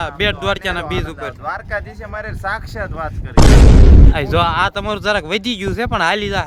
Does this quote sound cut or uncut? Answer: uncut